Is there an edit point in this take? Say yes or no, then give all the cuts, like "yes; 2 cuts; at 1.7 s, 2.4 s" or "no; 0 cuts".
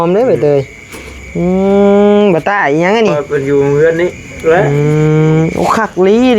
yes; 1 cut; at 3.2 s